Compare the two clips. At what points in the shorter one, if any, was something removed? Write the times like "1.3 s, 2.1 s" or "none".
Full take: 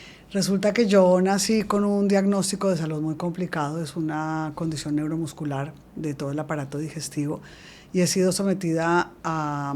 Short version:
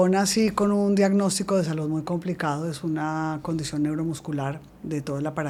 none